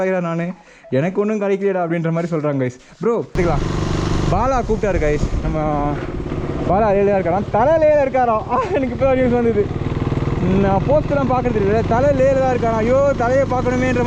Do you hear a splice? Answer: yes; 1 cut; at 3.3 s

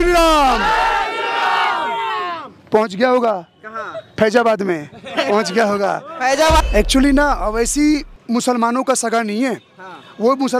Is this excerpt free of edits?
no; 1 cut; at 6.6 s

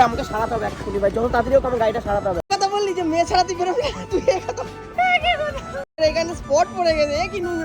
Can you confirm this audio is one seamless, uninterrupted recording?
no; 2 cuts; at 2.5 s, 6.0 s

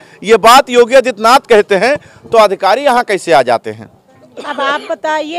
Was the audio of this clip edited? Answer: no; 0 cuts

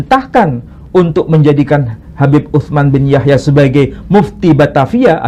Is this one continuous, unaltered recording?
yes; 0 cuts

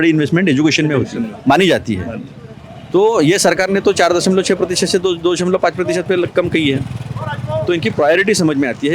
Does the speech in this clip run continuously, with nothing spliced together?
yes; 0 cuts

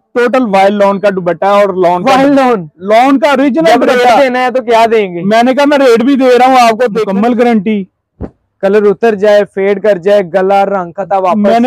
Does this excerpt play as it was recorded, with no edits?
no; 1 cut; at 7.0 s

